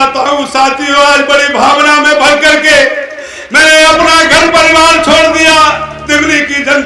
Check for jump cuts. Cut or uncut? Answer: uncut